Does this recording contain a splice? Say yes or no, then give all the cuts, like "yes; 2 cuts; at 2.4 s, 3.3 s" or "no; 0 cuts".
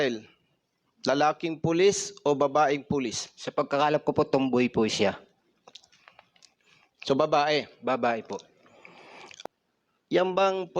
yes; 1 cut; at 9.4 s